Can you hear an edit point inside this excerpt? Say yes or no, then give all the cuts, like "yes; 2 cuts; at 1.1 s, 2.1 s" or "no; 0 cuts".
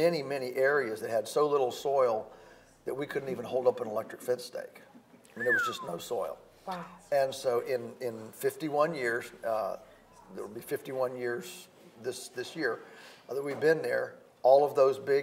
no; 0 cuts